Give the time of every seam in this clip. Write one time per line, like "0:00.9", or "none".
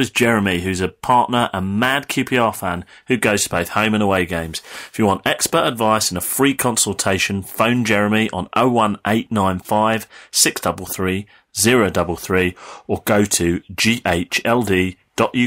none